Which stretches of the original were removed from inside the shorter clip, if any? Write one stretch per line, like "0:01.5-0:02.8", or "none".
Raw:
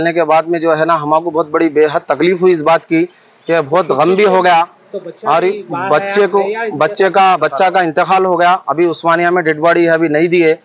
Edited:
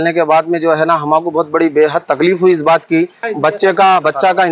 0:03.2-0:06.6